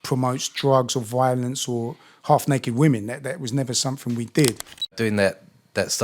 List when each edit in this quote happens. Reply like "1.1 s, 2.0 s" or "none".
4.9 s